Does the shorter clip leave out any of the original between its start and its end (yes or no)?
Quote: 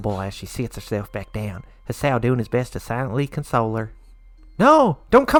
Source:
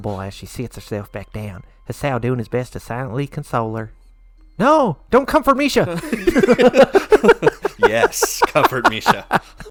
no